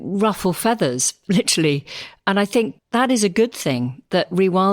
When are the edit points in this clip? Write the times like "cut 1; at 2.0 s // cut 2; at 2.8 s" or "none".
cut 1; at 2.8 s